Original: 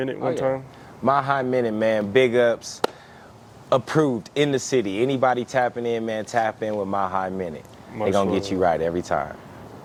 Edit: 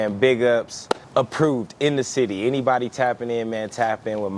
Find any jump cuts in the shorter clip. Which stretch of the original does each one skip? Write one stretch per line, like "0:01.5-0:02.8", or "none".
0:03.0-0:03.6